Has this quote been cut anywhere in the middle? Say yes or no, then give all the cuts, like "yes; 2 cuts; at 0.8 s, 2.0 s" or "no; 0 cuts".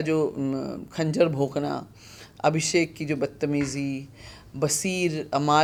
no; 0 cuts